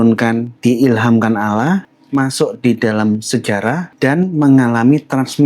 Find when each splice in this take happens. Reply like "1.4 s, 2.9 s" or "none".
1.9 s, 3.9 s